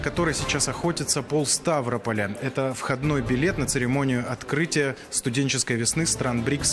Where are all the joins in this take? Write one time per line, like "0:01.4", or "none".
none